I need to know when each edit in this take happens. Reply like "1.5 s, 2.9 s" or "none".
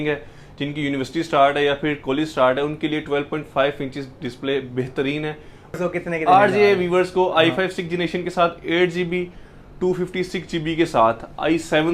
5.8 s